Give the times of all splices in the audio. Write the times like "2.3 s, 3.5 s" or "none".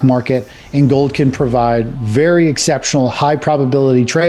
none